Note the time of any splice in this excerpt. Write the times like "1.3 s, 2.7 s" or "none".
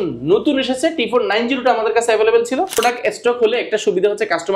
2.8 s